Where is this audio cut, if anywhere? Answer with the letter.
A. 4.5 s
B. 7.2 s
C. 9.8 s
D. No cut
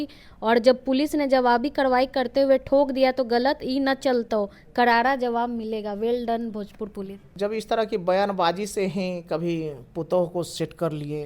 B